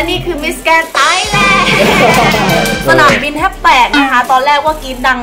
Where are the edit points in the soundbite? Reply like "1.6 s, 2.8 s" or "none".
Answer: 2.8 s